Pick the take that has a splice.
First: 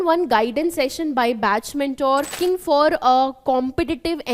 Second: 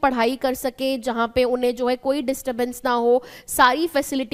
first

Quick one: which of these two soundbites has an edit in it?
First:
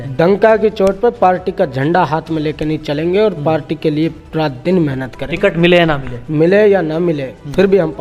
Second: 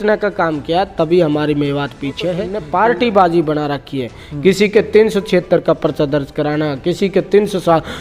second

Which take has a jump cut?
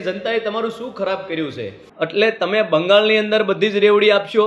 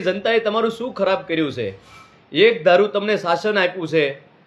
first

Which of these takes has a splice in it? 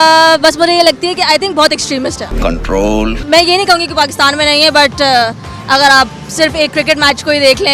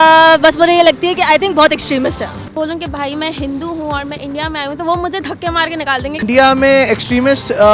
second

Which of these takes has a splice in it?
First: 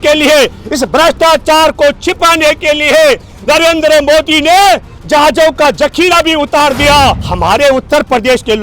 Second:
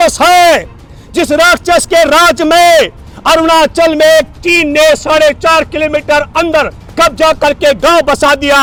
first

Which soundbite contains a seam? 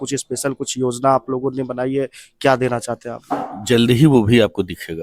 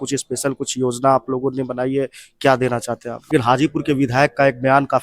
second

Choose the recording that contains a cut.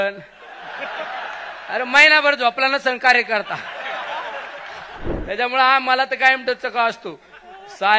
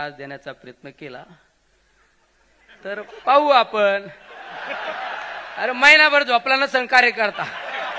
first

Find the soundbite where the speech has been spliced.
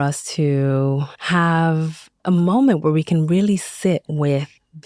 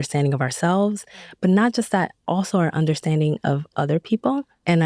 first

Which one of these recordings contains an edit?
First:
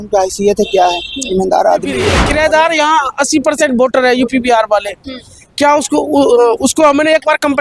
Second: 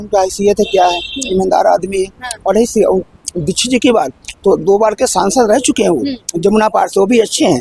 first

